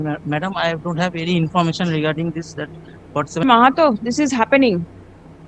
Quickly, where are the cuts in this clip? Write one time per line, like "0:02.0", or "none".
0:03.4